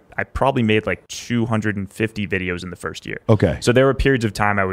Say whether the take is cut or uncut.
cut